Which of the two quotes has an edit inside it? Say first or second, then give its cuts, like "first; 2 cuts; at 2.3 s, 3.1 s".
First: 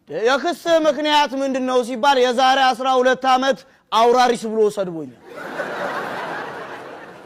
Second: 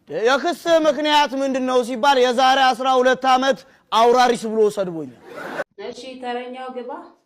second; 1 cut; at 5.7 s